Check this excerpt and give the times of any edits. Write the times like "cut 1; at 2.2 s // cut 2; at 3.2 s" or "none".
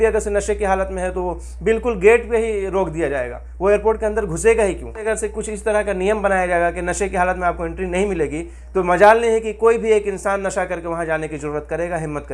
cut 1; at 5.0 s